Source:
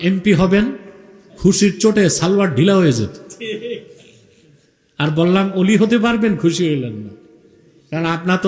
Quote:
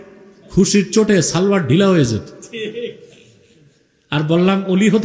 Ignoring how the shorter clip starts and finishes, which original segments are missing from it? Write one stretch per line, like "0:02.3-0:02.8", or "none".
none